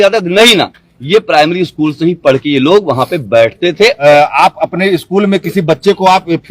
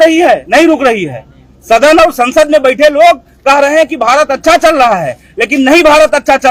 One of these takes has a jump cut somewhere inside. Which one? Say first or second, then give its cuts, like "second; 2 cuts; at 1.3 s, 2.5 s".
first; 1 cut; at 4.0 s